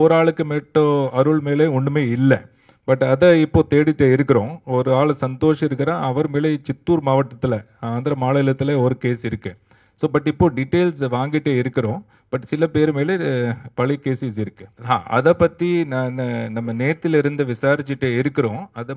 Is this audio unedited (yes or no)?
no